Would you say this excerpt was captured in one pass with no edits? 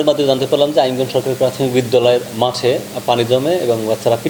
yes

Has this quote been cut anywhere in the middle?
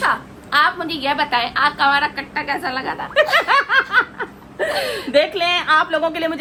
no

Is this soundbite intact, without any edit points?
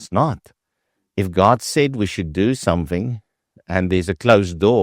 yes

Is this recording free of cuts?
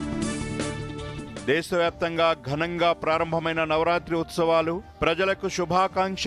no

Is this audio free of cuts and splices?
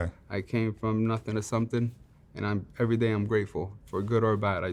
yes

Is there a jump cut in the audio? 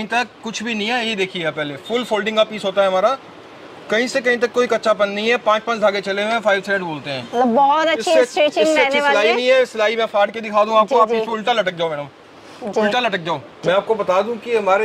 yes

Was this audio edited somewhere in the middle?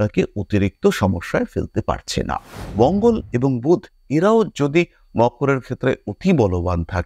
yes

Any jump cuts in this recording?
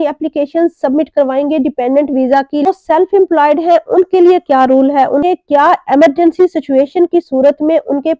yes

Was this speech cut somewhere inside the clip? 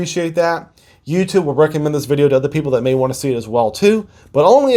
no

